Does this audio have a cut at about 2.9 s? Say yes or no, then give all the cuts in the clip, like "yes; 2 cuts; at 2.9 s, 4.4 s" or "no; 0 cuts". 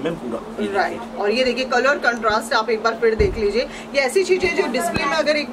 no; 0 cuts